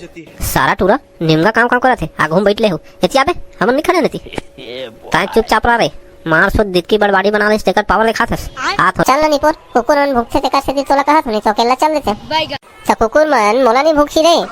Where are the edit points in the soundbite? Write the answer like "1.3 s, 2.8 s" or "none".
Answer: 9.0 s

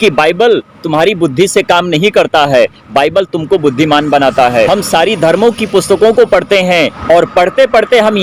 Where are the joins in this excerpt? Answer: 4.7 s, 7.0 s

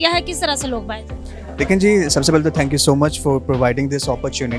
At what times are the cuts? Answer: none

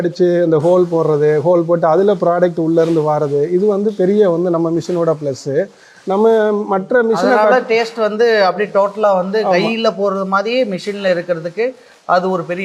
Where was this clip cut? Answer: none

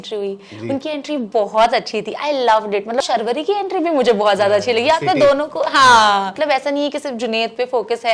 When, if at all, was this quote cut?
3.0 s, 6.3 s

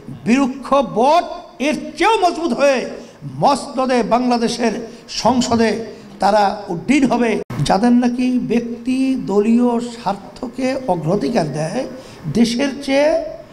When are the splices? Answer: 7.5 s

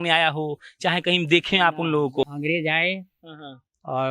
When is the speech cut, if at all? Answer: 2.3 s

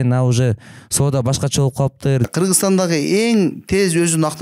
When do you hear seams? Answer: 2.2 s

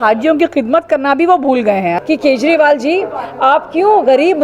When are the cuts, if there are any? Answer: 1.9 s

